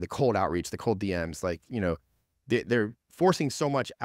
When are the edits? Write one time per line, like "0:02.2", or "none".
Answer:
none